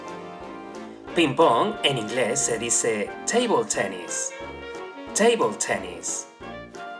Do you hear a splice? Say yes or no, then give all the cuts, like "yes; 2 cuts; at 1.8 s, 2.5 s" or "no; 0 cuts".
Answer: yes; 1 cut; at 5.9 s